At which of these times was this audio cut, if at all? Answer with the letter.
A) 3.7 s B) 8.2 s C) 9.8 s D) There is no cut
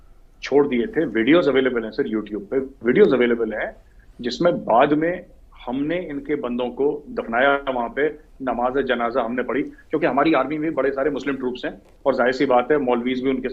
D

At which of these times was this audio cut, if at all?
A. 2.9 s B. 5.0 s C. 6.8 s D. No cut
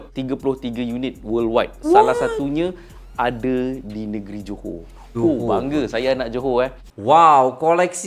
C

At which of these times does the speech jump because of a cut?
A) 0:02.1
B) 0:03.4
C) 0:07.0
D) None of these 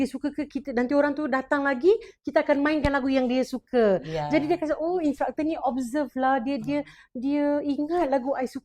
D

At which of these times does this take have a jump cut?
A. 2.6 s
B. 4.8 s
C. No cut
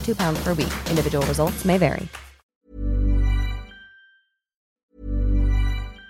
B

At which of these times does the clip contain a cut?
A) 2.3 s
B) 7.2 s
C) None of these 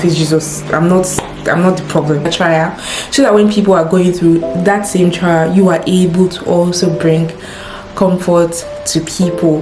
A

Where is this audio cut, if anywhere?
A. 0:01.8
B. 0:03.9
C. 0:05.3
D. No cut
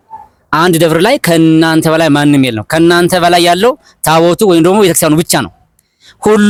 D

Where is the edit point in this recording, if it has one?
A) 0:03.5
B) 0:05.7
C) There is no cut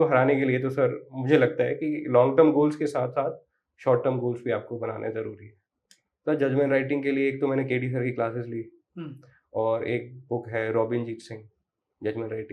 B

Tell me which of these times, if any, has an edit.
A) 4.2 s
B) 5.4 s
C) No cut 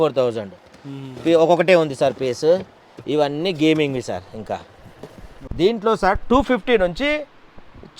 B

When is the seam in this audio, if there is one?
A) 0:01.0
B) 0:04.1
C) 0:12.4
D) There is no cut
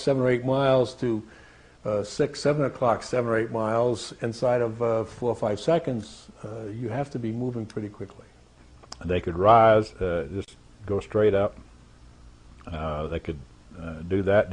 D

